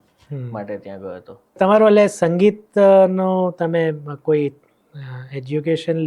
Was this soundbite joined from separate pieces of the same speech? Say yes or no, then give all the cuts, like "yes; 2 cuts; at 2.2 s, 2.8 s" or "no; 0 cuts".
yes; 1 cut; at 1.5 s